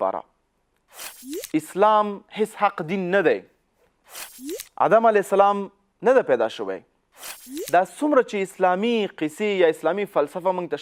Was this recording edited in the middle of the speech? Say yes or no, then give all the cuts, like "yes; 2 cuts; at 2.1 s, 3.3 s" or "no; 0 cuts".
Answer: no; 0 cuts